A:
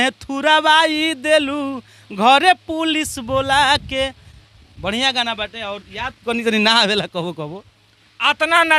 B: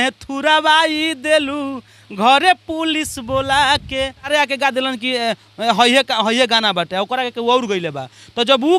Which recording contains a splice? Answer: B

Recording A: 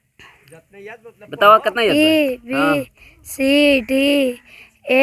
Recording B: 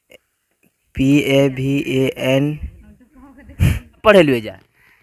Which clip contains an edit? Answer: B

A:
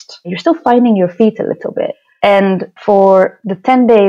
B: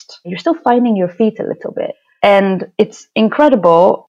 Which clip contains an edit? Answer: A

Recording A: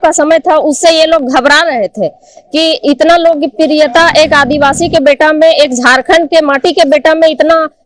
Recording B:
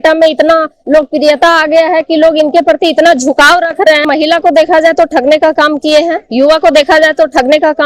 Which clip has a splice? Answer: B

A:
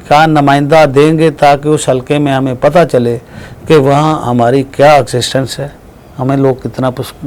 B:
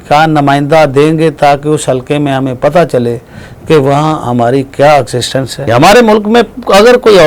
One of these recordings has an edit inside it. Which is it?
B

